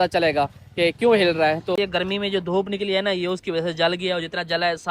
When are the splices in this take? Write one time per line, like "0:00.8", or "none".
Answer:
0:01.8